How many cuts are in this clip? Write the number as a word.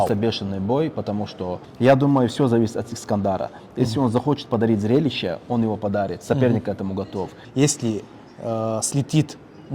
two